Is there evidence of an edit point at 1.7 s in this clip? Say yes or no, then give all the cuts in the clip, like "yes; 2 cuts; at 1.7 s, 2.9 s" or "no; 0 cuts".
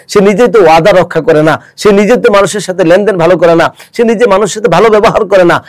no; 0 cuts